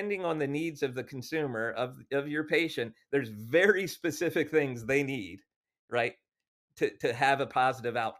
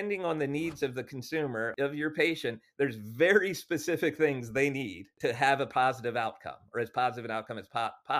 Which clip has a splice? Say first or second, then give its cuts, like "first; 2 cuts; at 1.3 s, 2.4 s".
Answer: second; 2 cuts; at 1.7 s, 5.1 s